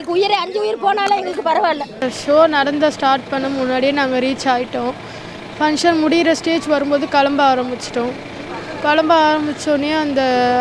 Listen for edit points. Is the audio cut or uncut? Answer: uncut